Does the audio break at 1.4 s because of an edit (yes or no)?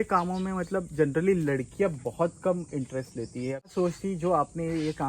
no